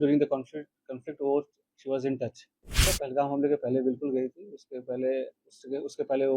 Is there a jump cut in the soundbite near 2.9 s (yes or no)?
yes